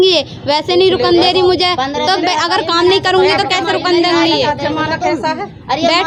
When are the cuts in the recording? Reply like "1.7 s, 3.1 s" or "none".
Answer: none